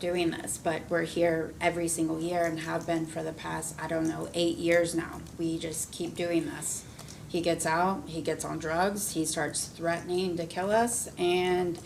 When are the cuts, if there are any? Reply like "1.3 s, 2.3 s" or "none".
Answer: none